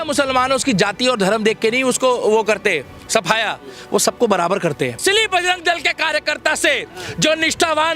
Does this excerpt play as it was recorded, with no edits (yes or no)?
no